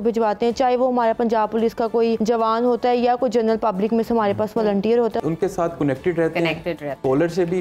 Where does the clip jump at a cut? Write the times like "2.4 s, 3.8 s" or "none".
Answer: 2.2 s, 5.2 s